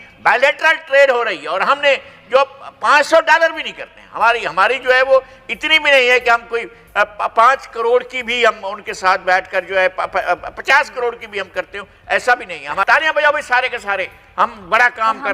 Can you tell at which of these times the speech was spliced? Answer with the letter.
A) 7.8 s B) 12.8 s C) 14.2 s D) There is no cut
B